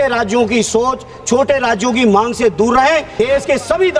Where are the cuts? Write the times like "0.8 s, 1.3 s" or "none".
3.1 s